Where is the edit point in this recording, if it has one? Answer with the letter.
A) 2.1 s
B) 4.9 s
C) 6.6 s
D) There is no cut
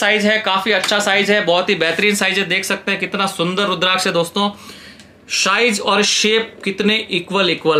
D